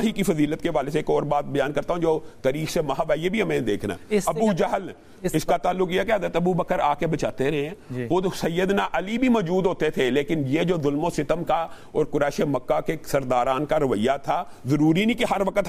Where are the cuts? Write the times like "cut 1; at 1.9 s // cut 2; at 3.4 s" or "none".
none